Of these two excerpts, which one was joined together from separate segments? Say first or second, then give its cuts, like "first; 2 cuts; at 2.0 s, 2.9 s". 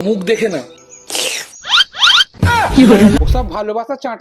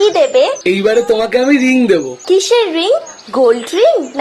first; 1 cut; at 3.2 s